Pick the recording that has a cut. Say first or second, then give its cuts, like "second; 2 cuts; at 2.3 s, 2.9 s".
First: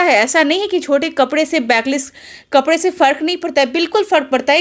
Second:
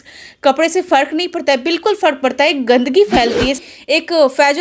second; 1 cut; at 3.6 s